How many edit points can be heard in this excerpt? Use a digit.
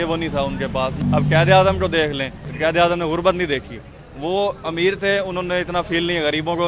2